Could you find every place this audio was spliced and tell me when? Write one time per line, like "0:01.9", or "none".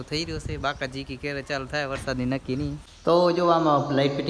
0:02.9